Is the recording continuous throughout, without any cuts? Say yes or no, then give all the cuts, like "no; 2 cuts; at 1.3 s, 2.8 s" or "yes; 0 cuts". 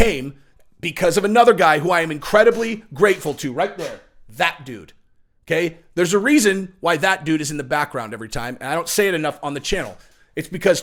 yes; 0 cuts